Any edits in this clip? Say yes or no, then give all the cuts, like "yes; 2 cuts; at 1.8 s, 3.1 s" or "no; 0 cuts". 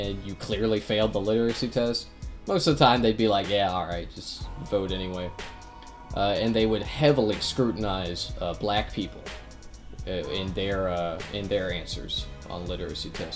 no; 0 cuts